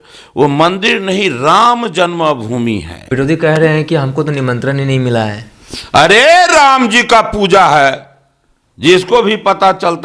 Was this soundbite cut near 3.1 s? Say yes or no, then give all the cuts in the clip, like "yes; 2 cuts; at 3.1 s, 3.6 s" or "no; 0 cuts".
yes; 1 cut; at 3.1 s